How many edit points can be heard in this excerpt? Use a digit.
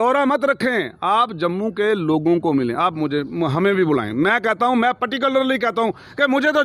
0